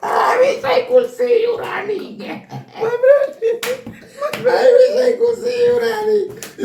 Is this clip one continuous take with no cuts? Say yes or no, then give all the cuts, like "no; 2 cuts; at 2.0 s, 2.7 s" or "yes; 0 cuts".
yes; 0 cuts